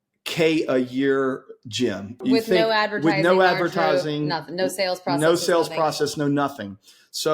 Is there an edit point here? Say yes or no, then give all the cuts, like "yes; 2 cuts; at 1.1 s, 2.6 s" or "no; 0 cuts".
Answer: yes; 1 cut; at 2.2 s